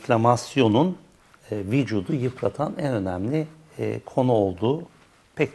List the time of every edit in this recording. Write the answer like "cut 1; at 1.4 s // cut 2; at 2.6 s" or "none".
none